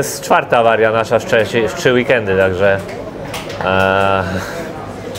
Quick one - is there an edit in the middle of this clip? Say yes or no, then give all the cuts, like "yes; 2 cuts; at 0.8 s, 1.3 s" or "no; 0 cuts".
no; 0 cuts